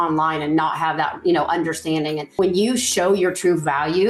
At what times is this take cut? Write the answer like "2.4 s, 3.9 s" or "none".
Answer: 2.2 s